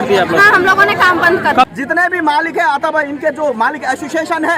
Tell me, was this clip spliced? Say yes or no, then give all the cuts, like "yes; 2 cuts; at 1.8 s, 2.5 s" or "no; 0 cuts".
yes; 1 cut; at 1.7 s